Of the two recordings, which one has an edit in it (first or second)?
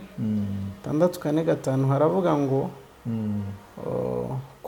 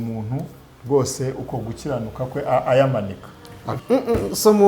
second